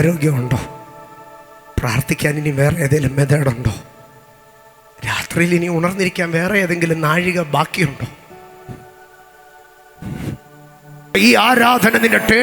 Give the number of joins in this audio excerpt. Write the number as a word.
one